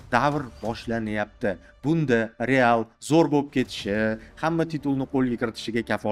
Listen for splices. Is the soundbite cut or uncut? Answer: uncut